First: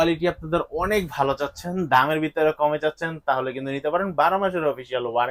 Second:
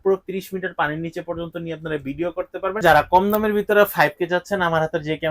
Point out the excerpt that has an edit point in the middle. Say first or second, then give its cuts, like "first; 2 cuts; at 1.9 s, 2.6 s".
second; 1 cut; at 2.8 s